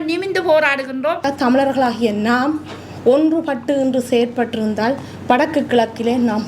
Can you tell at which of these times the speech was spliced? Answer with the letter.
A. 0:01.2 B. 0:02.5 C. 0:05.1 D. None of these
A